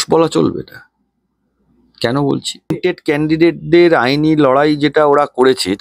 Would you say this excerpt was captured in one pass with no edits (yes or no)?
no